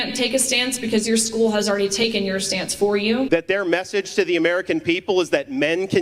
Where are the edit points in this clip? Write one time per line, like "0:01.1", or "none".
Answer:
0:03.3